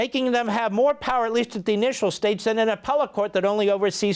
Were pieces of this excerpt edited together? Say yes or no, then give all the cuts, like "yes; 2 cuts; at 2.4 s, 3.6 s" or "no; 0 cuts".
no; 0 cuts